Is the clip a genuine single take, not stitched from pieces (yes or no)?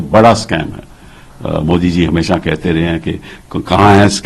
yes